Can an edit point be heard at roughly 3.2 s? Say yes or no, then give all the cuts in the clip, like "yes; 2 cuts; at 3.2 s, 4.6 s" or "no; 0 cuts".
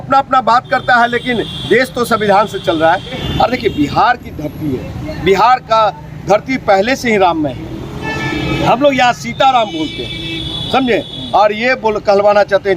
yes; 1 cut; at 3.2 s